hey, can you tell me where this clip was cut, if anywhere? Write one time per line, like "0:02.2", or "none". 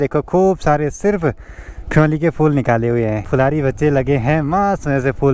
none